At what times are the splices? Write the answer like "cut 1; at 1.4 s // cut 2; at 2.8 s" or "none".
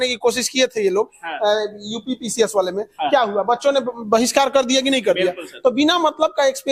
none